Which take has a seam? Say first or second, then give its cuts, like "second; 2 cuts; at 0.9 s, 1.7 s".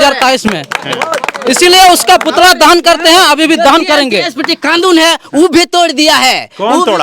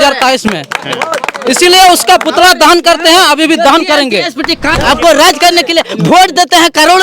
second; 1 cut; at 4.7 s